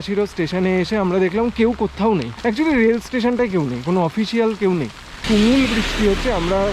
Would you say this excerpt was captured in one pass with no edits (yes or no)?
no